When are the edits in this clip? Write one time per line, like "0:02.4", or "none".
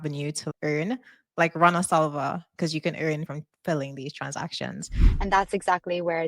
0:03.2
0:05.0